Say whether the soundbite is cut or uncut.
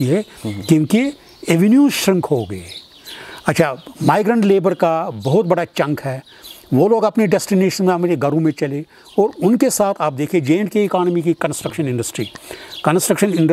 uncut